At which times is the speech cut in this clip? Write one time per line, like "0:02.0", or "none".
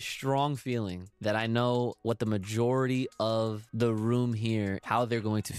0:01.1
0:02.0
0:03.6
0:04.8